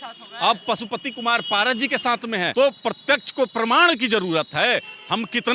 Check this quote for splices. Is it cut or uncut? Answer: cut